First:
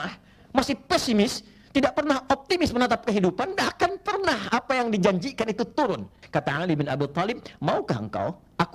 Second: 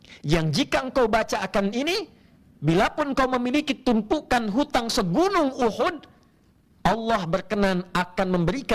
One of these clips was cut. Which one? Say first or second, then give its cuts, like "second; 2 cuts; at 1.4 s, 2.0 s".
first; 1 cut; at 6.2 s